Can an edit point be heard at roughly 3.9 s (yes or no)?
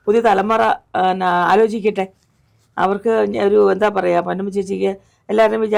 no